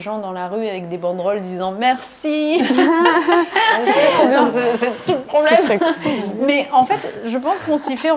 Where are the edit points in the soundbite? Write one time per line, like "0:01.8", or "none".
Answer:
none